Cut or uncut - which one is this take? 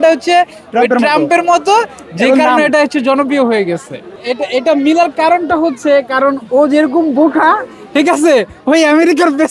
cut